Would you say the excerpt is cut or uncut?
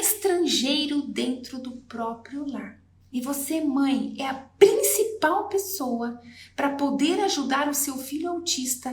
uncut